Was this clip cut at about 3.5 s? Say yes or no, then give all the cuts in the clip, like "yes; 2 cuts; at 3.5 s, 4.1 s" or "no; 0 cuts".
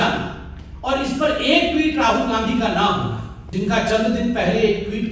yes; 1 cut; at 3.5 s